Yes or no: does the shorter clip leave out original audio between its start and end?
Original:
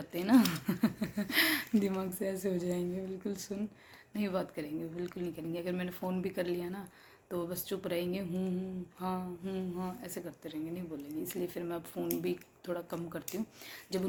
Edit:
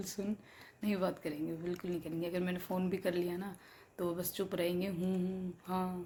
no